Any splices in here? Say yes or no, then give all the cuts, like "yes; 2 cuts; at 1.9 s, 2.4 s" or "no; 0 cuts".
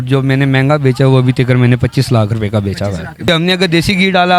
yes; 1 cut; at 3.1 s